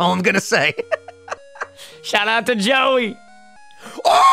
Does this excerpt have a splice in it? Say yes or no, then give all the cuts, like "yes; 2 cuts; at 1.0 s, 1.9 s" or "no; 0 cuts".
no; 0 cuts